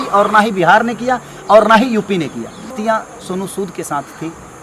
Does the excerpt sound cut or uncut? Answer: cut